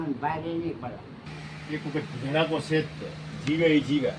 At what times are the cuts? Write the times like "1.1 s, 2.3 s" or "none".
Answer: 1.2 s